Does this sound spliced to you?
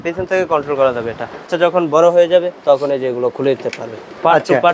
yes; 2 cuts; at 1.5 s, 2.5 s

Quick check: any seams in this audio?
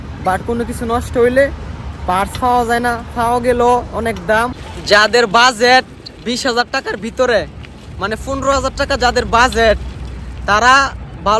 yes; 1 cut; at 4.7 s

